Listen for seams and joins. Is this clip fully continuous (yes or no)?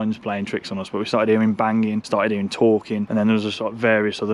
no